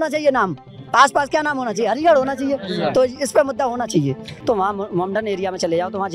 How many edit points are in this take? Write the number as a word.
one